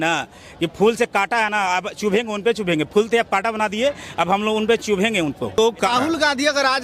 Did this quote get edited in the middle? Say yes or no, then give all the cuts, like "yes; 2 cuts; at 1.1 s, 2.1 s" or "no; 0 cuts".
yes; 1 cut; at 5.8 s